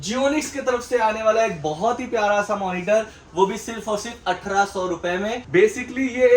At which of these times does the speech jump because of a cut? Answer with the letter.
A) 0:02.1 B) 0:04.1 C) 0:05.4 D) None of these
C